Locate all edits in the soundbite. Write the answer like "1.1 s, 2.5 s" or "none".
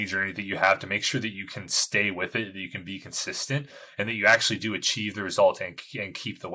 none